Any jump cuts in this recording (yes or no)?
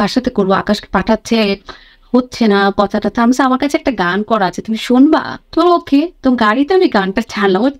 no